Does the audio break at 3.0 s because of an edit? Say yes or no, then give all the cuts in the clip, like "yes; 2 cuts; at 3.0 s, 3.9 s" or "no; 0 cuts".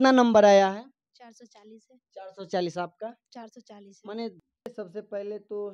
no; 1 cut; at 4.4 s